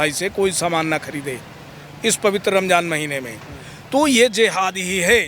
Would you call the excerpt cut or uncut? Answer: uncut